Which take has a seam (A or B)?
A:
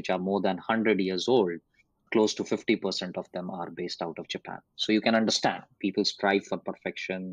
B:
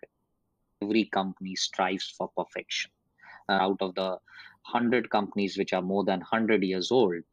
B